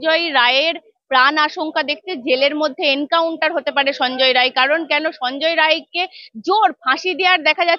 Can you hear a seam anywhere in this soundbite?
no; 0 cuts

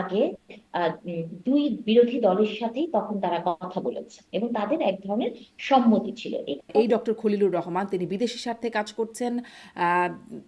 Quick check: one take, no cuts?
no; 1 cut; at 6.7 s

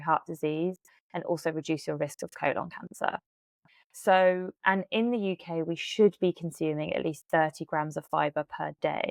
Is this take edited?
no; 0 cuts

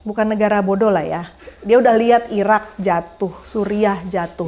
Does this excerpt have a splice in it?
no; 0 cuts

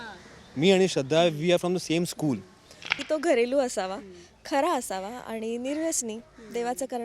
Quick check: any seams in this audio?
yes; 1 cut; at 3.0 s

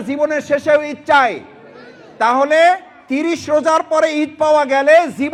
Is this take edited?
no; 0 cuts

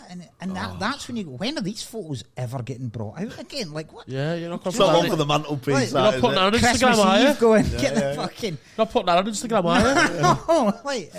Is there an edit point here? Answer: no; 0 cuts

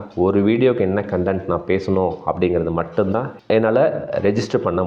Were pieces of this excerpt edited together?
yes; 1 cut; at 3.4 s

